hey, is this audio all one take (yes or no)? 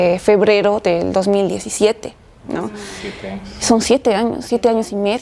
yes